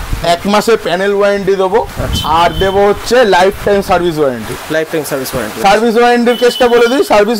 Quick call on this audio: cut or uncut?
uncut